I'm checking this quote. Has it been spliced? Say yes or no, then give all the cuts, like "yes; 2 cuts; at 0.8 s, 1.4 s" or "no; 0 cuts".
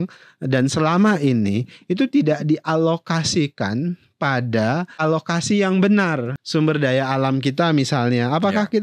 yes; 2 cuts; at 5.0 s, 6.3 s